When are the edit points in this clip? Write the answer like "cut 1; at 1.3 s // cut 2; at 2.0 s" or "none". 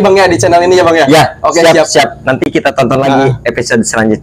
none